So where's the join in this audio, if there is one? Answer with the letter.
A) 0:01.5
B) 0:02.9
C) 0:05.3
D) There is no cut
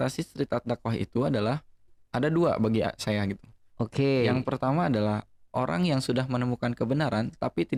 D